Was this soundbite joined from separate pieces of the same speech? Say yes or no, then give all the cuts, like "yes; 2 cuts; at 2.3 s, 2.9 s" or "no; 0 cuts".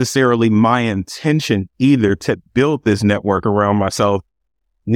no; 0 cuts